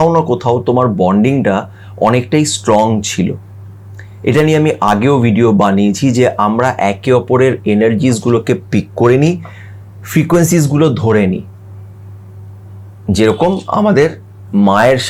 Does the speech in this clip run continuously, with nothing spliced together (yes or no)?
yes